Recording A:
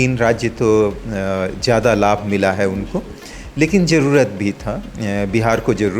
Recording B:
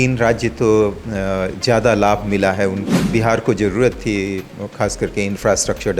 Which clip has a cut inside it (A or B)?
B